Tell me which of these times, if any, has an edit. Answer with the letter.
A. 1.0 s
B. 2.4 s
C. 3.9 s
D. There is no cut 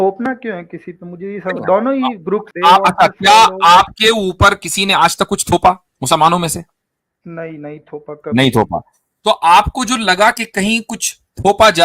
B